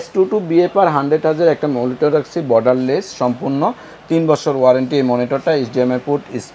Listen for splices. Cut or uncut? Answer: uncut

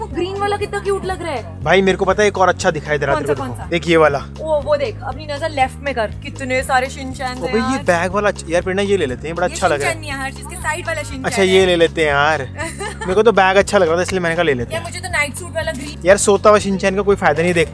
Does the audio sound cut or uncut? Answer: uncut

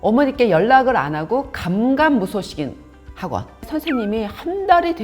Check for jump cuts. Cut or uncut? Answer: cut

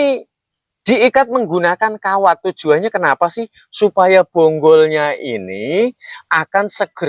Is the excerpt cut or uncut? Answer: uncut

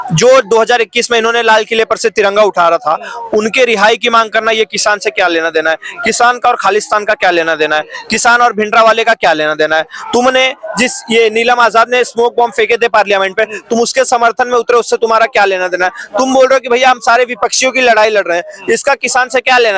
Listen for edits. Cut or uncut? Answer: uncut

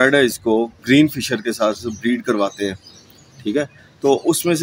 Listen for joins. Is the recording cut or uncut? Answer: uncut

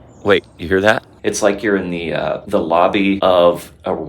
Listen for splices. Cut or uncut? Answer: cut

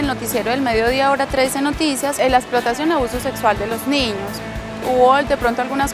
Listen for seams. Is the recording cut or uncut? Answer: cut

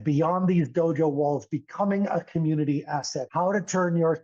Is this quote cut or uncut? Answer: cut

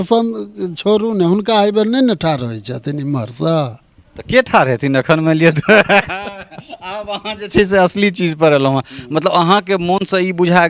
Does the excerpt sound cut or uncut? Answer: uncut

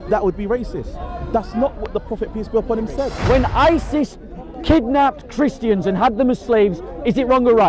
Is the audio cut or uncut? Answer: cut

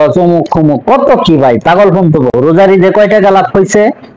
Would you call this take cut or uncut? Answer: cut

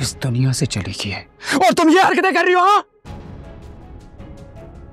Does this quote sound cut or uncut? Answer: uncut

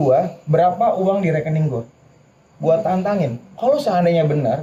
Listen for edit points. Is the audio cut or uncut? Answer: uncut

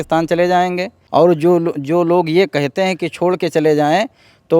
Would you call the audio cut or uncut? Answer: cut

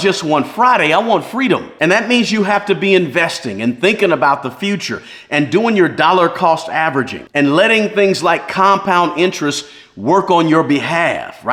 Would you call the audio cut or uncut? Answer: uncut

